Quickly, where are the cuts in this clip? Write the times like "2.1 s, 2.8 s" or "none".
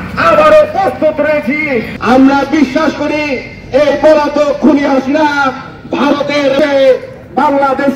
1.9 s